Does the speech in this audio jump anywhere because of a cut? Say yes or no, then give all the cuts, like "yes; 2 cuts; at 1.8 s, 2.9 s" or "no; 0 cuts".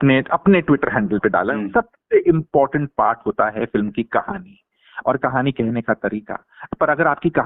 yes; 1 cut; at 1.5 s